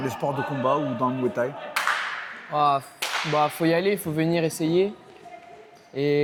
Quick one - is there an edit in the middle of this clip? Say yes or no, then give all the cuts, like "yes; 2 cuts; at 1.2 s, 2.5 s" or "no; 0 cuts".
no; 0 cuts